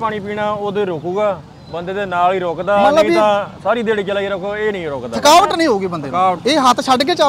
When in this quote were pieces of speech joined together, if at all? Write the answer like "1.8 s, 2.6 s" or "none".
6.4 s